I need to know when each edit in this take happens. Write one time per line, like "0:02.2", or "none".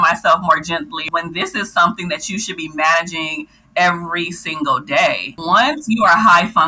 0:01.0
0:05.3

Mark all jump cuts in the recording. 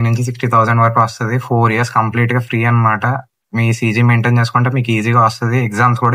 none

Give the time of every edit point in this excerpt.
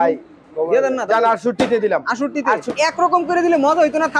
0:02.7

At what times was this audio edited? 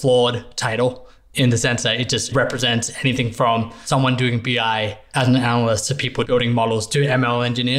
0:03.8
0:05.0

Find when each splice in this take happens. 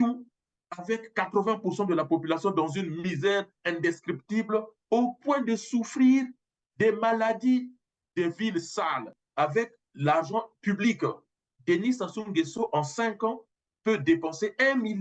0:09.1

